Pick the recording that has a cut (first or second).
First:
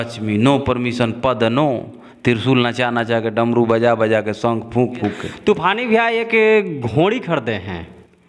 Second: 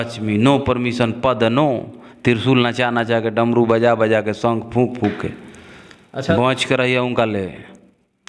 first